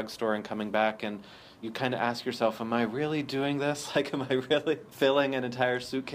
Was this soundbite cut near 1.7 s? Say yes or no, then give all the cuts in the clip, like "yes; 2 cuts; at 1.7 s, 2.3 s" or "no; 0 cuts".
yes; 2 cuts; at 1.7 s, 4.9 s